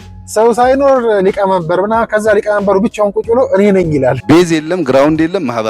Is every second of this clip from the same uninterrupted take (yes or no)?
no